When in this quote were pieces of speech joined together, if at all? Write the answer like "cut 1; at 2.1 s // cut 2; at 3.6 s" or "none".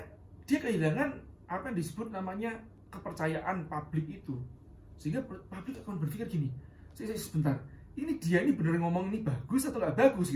cut 1; at 2.7 s